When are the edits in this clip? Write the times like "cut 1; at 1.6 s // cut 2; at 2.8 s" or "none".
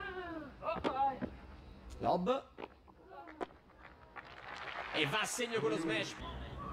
cut 1; at 5.3 s